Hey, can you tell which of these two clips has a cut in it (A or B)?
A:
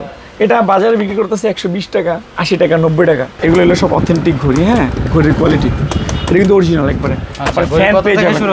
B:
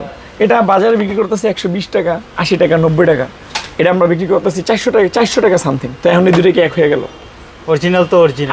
A